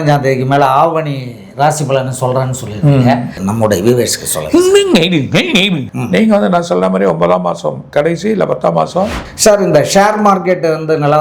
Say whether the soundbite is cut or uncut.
cut